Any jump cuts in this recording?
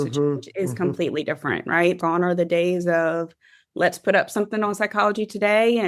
yes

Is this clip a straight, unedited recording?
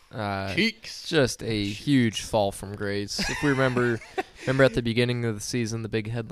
yes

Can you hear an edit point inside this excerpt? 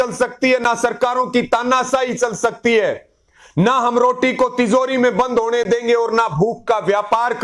no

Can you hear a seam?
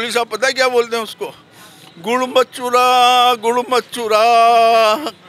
no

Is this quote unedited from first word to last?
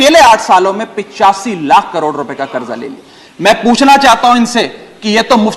yes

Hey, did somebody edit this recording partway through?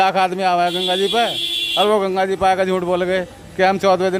no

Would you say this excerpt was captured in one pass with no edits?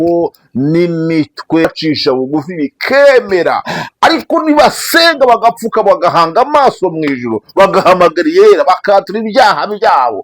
no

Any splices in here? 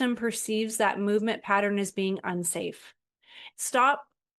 yes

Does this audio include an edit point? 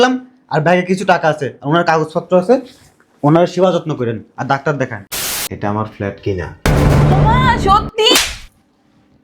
yes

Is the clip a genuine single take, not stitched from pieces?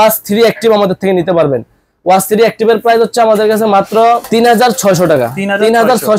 yes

